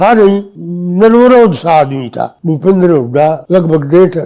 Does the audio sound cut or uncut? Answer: cut